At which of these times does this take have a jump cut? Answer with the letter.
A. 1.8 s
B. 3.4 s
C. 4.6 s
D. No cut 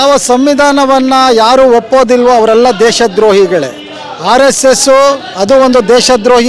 D